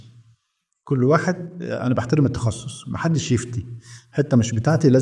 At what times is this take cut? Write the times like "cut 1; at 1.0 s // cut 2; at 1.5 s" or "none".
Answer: none